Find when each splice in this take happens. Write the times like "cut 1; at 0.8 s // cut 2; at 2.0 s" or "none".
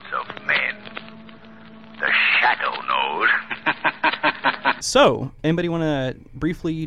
cut 1; at 4.8 s